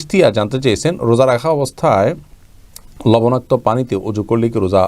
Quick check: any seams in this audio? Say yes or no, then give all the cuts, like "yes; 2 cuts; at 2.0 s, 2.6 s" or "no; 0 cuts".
no; 0 cuts